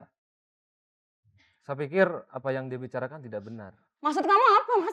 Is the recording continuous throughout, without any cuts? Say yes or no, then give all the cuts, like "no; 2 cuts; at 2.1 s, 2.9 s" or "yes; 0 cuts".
yes; 0 cuts